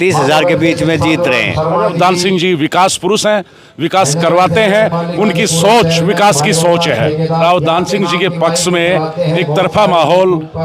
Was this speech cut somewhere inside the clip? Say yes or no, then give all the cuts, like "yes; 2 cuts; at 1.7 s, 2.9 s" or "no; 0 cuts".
yes; 2 cuts; at 1.9 s, 7.4 s